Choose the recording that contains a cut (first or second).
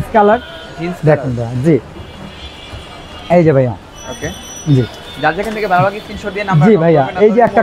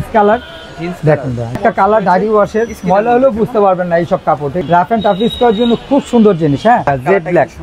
second